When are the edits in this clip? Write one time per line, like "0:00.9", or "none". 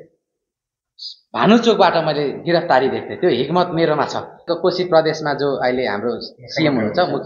0:04.5